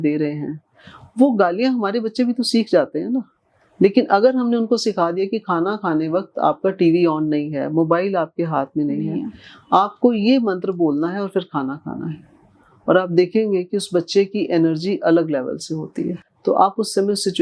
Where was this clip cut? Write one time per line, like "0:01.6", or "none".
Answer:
0:16.2